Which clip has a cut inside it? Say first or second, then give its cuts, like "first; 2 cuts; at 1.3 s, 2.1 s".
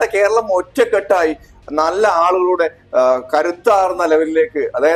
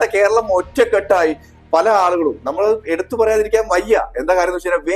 second; 1 cut; at 1.5 s